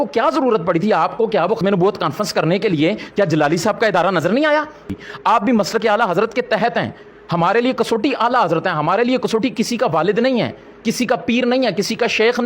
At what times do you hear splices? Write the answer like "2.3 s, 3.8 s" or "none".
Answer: 1.6 s, 5.0 s